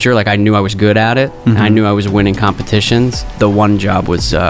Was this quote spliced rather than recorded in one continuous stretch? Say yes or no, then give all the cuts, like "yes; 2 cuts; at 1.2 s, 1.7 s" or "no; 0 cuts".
yes; 1 cut; at 3.3 s